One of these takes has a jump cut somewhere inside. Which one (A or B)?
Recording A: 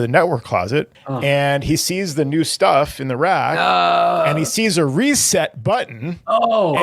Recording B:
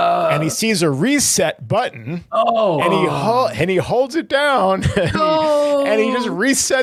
A